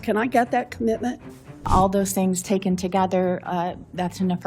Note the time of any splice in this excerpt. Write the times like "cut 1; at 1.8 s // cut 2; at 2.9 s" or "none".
cut 1; at 1.7 s